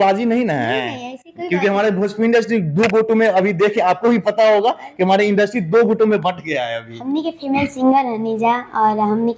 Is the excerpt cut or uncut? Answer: uncut